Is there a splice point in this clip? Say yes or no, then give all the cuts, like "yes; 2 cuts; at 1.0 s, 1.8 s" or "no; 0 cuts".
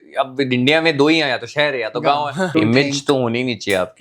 yes; 1 cut; at 2.5 s